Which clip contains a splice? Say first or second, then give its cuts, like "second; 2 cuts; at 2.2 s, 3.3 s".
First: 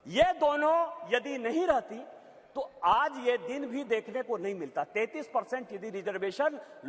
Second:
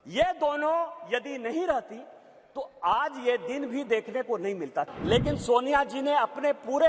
second; 1 cut; at 4.9 s